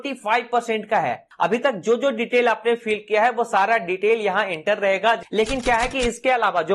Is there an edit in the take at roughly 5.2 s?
yes; 2 cuts; at 1.2 s, 5.2 s

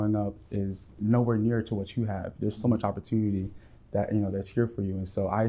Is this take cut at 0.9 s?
no; 0 cuts

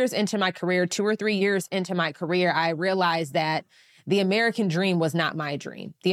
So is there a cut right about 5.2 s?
no; 1 cut; at 1.4 s

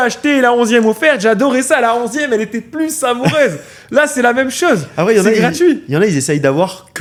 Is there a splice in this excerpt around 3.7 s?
no; 0 cuts

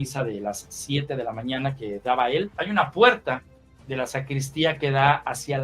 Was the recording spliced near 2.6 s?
yes; 1 cut; at 2.6 s

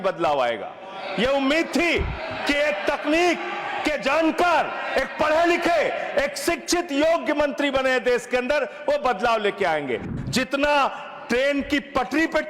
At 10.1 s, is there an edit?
yes; 1 cut; at 10.1 s

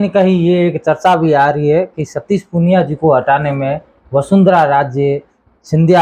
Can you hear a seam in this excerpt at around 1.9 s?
no; 0 cuts

